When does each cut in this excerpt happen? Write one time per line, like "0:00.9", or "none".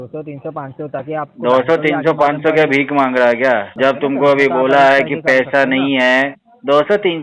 0:03.7